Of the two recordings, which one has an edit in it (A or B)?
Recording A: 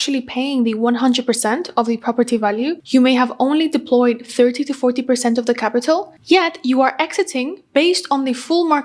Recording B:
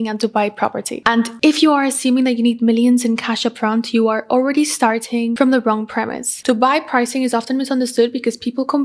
B